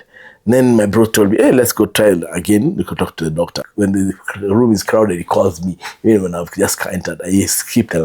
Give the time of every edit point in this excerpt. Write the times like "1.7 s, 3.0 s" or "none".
3.6 s